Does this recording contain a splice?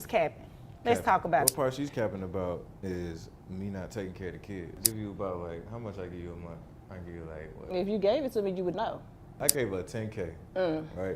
yes; 3 cuts; at 1.5 s, 4.8 s, 9.4 s

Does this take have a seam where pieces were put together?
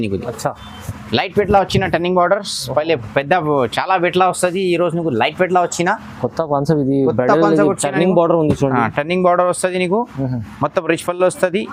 no; 0 cuts

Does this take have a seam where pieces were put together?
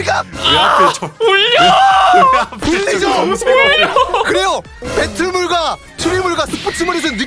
no; 0 cuts

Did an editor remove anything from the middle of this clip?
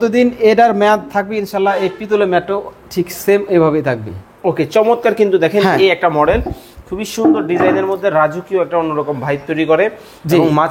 no; 0 cuts

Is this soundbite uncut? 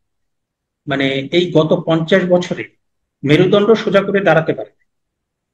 yes; 0 cuts

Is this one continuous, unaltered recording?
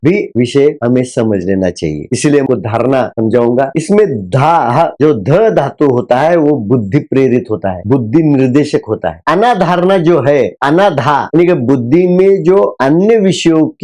no; 1 cut; at 2.4 s

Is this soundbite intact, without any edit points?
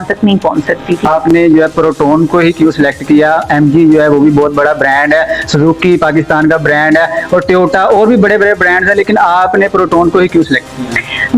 no; 1 cut; at 1.0 s

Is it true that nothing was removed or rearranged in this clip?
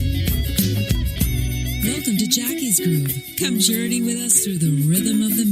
yes; 0 cuts

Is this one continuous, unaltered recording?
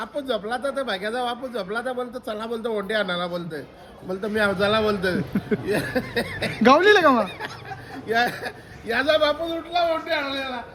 yes; 0 cuts

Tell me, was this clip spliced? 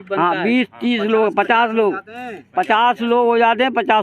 no; 0 cuts

